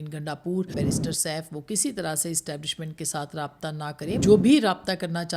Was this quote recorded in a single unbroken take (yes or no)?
no